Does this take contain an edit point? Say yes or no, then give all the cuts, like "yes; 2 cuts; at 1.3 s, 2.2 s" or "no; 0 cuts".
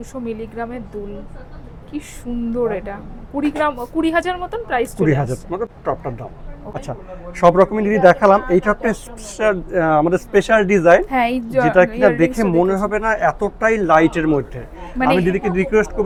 no; 0 cuts